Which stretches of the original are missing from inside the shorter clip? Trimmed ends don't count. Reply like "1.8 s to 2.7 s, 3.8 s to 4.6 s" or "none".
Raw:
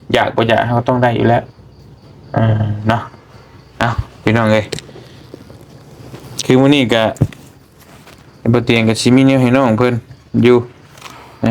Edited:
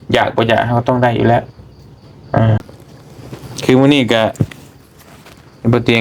2.6 s to 5.4 s